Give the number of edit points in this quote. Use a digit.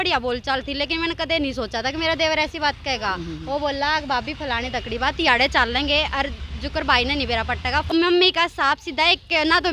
1